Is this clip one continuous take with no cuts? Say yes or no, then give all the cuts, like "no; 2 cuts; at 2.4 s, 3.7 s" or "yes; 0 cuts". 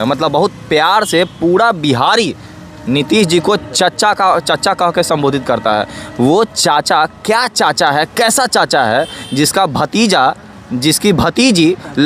yes; 0 cuts